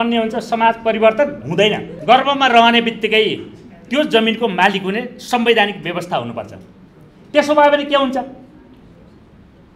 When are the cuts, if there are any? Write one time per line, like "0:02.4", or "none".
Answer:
0:01.9